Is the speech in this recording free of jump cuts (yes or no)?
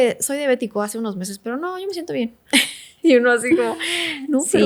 yes